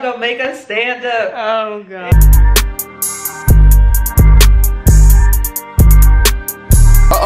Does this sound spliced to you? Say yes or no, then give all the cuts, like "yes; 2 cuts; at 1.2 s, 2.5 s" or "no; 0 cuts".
yes; 1 cut; at 2.1 s